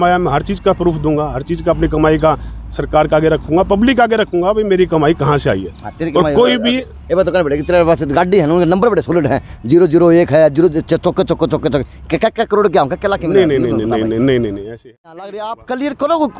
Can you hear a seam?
yes; 1 cut; at 14.8 s

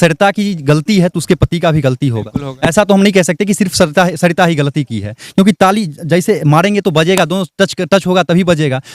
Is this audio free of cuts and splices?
yes; 0 cuts

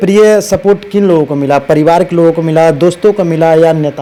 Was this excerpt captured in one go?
yes; 0 cuts

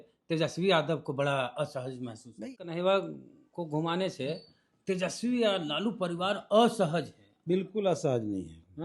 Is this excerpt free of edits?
no; 1 cut; at 2.5 s

